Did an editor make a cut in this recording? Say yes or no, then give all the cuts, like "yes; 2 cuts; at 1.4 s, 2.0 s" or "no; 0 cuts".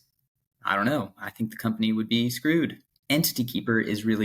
yes; 1 cut; at 2.9 s